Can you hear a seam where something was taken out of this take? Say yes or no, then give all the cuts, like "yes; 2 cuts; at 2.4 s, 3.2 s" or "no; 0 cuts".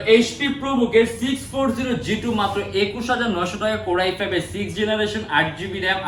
no; 0 cuts